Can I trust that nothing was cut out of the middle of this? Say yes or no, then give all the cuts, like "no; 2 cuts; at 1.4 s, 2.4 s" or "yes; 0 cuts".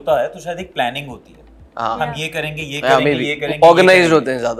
yes; 0 cuts